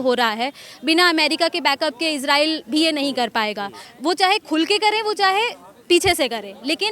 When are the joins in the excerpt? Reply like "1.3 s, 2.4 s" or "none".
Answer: 3.8 s